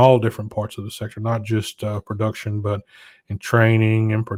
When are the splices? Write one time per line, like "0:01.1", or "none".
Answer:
none